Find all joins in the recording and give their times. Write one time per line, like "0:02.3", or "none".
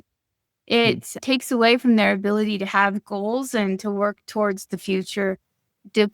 0:01.2